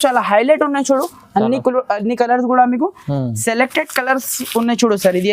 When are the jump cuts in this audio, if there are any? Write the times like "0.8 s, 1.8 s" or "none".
none